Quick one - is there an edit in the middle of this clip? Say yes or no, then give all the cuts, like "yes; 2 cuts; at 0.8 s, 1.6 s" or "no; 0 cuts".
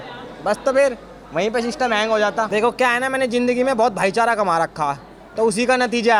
no; 0 cuts